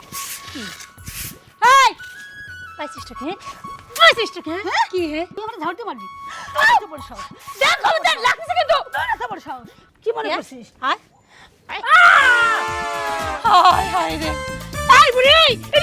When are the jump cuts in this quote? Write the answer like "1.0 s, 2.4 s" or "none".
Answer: 5.4 s, 9.7 s